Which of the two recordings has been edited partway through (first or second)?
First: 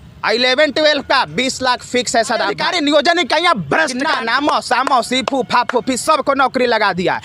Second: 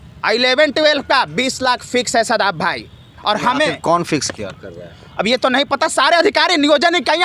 first